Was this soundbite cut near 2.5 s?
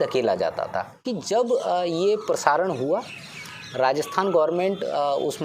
no; 1 cut; at 1.1 s

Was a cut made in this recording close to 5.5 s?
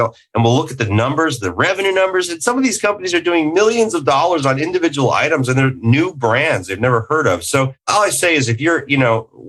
no; 1 cut; at 7.9 s

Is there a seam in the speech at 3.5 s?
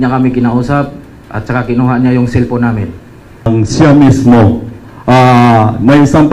yes; 1 cut; at 3.5 s

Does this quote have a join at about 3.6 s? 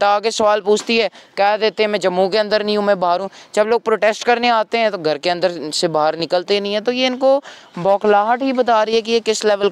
no; 0 cuts

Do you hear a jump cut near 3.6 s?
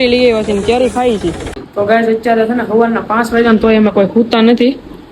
no; 1 cut; at 1.5 s

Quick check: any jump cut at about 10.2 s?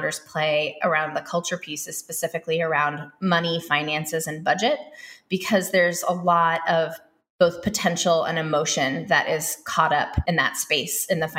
yes; 1 cut; at 10.2 s

